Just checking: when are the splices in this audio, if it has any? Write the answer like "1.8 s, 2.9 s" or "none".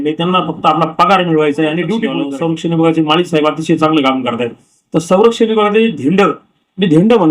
2.2 s